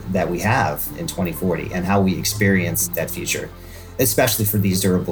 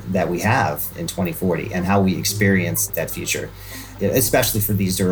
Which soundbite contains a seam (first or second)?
first